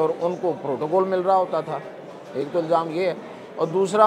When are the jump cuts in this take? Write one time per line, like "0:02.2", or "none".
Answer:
none